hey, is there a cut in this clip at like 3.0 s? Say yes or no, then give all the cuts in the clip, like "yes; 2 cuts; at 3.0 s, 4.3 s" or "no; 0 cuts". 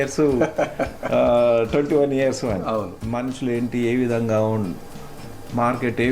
yes; 1 cut; at 3.0 s